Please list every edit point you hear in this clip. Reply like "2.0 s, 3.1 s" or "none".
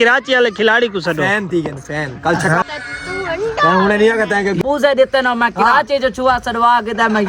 2.6 s, 4.6 s